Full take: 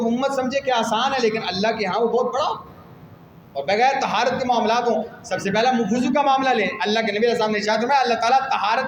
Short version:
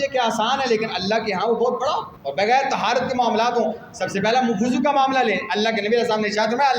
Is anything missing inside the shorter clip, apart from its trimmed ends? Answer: yes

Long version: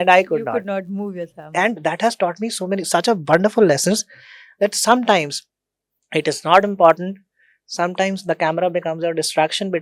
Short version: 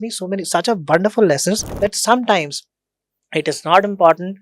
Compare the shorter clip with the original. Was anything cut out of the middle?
yes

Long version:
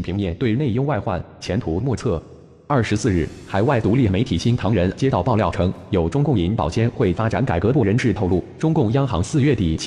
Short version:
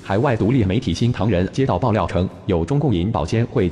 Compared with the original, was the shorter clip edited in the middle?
no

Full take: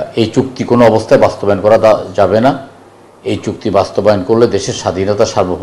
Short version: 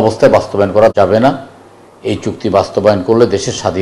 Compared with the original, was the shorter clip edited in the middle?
yes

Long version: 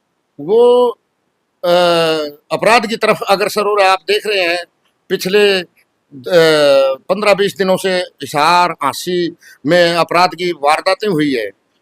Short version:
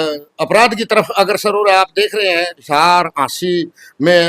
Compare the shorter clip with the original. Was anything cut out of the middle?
yes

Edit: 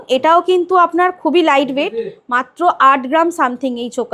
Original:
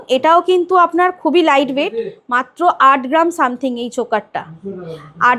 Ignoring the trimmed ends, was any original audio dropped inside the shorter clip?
no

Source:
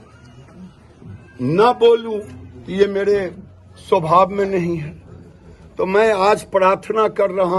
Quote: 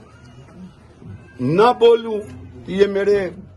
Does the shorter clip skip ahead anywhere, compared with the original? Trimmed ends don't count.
no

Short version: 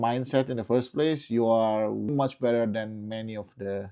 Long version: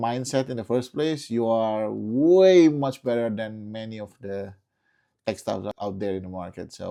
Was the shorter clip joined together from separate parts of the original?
yes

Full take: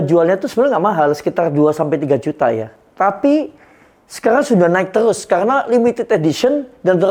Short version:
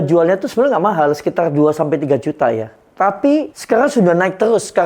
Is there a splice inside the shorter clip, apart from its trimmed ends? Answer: yes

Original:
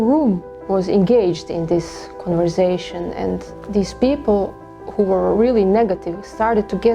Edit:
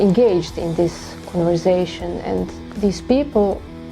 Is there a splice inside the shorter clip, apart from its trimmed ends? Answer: no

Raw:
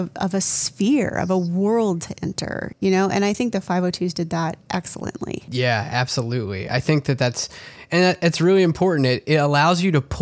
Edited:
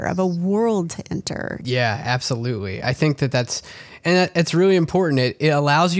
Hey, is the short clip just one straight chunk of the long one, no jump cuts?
no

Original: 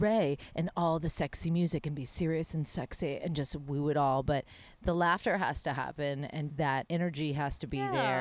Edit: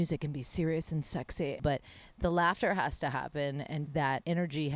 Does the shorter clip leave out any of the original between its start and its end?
yes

